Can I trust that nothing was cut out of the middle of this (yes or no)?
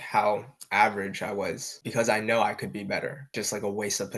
no